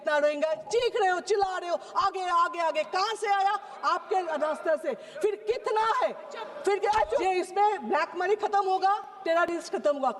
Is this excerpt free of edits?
no; 1 cut; at 7.2 s

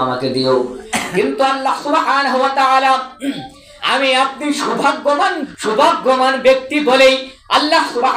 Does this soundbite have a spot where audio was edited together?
yes; 1 cut; at 5.5 s

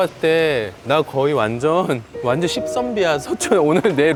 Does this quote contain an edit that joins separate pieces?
no; 0 cuts

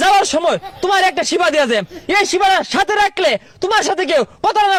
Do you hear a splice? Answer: no; 0 cuts

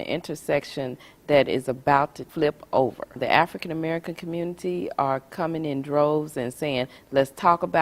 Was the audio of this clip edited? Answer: yes; 2 cuts; at 2.2 s, 3.2 s

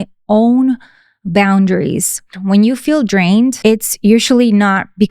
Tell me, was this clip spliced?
yes; 2 cuts; at 2.4 s, 3.6 s

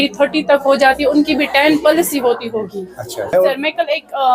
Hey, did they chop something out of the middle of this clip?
no; 0 cuts

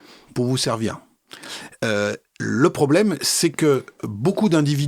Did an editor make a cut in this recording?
no; 0 cuts

